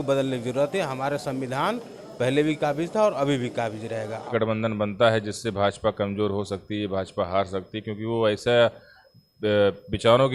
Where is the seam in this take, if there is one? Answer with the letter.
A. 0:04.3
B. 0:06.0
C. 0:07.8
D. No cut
A